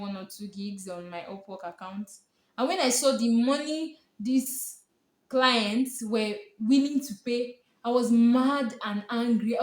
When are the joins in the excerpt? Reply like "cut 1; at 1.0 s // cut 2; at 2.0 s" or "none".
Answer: none

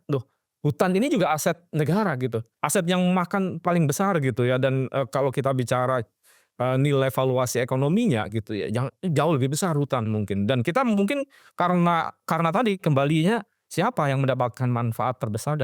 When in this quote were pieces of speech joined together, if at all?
cut 1; at 2.5 s

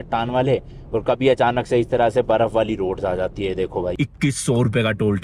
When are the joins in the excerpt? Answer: cut 1; at 3.9 s

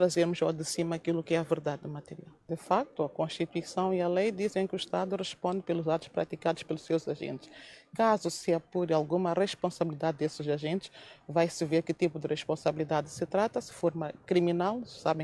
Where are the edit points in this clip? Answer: cut 1; at 3.8 s

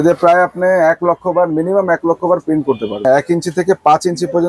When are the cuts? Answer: cut 1; at 3.0 s

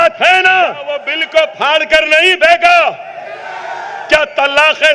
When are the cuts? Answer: cut 1; at 1.2 s

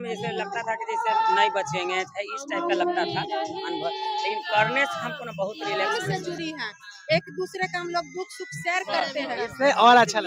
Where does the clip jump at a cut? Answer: cut 1; at 6.2 s

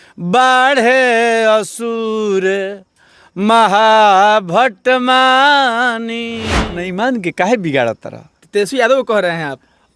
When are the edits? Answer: cut 1; at 6.7 s

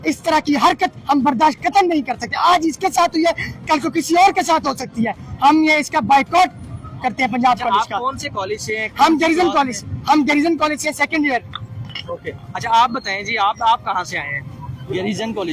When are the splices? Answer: none

